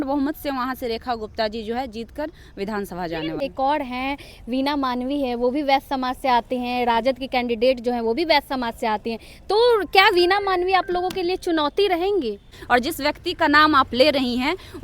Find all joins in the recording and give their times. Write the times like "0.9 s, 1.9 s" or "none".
3.4 s, 12.5 s